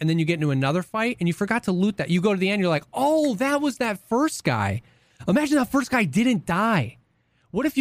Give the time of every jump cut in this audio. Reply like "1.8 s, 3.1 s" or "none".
none